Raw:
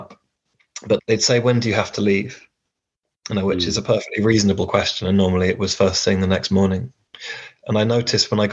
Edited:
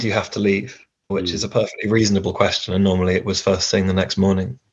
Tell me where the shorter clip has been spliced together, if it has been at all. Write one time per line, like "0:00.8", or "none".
0:01.1